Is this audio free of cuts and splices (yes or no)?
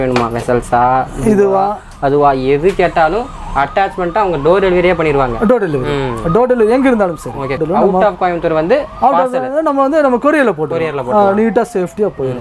no